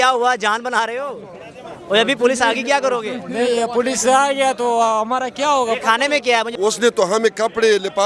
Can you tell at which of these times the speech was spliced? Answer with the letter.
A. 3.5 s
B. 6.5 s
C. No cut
B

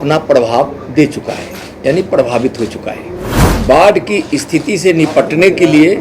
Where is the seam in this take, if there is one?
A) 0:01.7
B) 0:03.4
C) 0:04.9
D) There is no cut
B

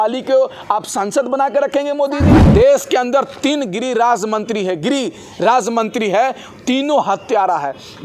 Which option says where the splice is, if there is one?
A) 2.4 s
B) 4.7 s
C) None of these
A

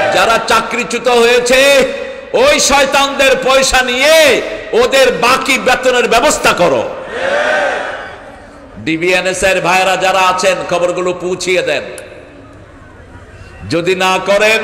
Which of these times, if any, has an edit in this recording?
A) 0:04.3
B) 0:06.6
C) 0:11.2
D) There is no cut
D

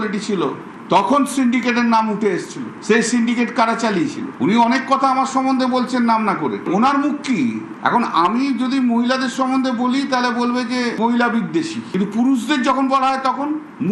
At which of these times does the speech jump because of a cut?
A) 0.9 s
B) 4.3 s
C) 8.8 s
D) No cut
B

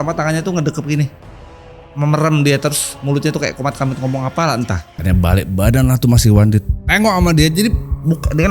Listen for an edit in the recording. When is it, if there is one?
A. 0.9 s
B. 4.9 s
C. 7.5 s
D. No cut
B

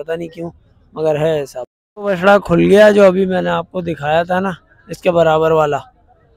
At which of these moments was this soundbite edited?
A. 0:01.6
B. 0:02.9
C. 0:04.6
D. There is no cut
A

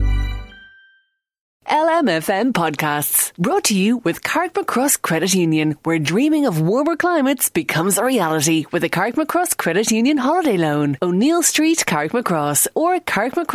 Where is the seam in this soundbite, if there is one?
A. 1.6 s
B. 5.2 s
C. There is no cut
A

